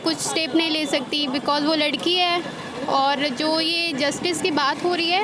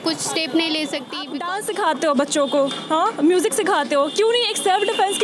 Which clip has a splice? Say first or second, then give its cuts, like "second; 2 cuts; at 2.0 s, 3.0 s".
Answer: second; 1 cut; at 1.3 s